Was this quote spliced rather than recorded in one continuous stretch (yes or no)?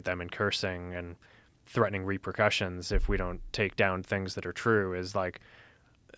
no